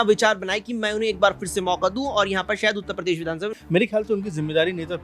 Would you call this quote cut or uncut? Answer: cut